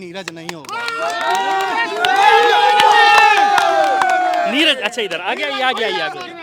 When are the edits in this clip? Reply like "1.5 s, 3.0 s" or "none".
none